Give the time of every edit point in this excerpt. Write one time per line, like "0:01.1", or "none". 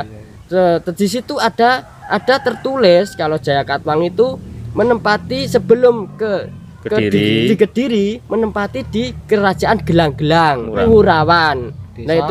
0:10.8